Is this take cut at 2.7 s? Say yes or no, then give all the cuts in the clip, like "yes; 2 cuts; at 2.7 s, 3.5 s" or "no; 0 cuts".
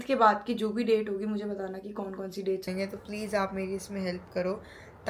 yes; 1 cut; at 2.7 s